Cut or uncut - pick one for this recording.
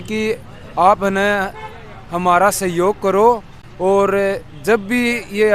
uncut